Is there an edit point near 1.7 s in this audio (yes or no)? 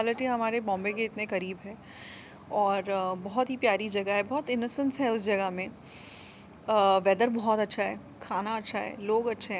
no